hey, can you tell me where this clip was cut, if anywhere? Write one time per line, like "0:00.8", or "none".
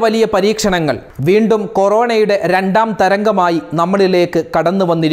0:01.1